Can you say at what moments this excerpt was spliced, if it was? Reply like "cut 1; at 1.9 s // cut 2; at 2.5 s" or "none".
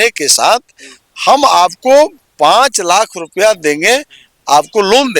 none